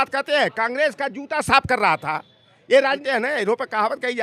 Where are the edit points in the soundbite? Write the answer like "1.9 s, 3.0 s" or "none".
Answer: 3.0 s